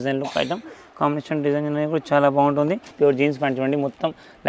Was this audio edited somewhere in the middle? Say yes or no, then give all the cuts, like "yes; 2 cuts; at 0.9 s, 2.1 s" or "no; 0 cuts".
yes; 1 cut; at 2.9 s